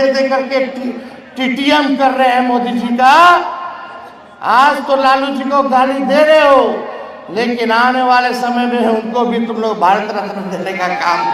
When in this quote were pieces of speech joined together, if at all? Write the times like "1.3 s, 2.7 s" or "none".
none